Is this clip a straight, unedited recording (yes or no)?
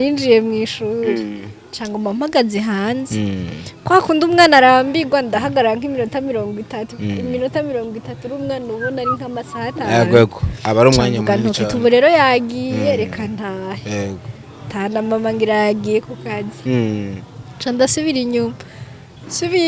yes